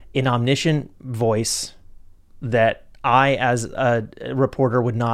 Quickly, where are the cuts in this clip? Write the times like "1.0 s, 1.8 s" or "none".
none